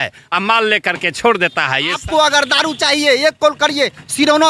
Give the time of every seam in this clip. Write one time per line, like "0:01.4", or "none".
0:02.0